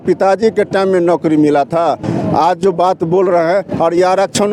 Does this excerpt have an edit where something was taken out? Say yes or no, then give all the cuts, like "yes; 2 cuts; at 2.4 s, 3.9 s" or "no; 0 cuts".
no; 0 cuts